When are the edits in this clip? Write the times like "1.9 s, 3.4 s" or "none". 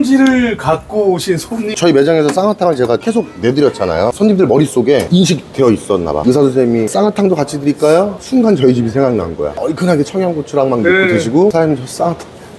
1.7 s, 4.1 s, 6.2 s, 9.5 s

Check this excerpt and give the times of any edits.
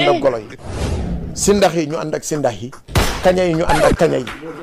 none

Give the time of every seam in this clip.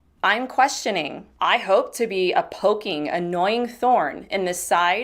1.2 s

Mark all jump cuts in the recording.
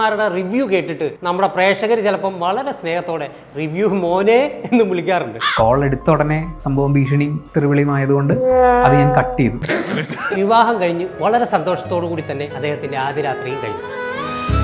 10.2 s

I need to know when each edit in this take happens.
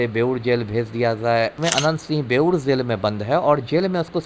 1.6 s

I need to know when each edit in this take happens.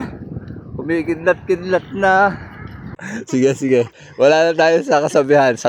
3.1 s

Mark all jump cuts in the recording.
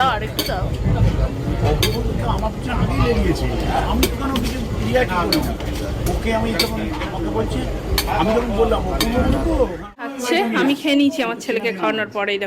9.9 s

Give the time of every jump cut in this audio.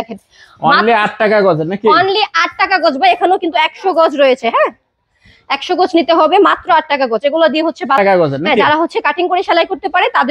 8.0 s

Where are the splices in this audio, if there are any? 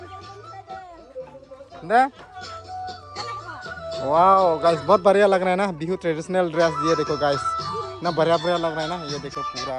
none

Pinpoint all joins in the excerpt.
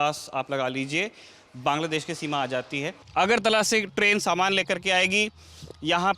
3.0 s

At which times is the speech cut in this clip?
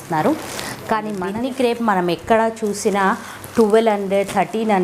1.1 s

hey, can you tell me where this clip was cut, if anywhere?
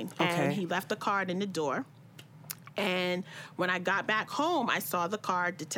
none

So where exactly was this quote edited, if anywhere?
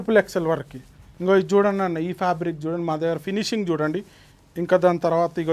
1.3 s

